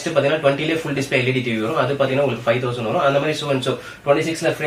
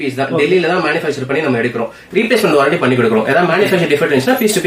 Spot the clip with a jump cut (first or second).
second